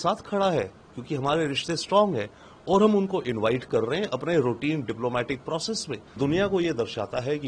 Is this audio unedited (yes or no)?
no